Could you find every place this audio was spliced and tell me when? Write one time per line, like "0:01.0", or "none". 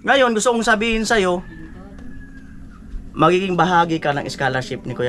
none